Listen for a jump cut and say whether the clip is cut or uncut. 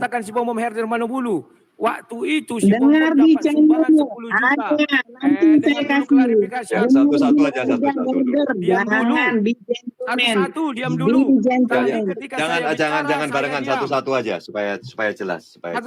uncut